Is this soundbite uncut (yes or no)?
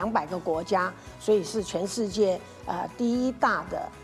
yes